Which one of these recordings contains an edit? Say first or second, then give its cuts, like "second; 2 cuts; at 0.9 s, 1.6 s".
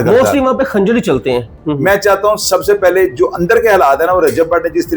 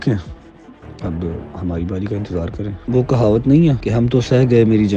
first; 1 cut; at 1.5 s